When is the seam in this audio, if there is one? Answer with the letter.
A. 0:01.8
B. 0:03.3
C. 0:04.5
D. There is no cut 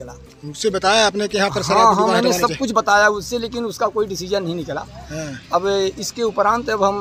D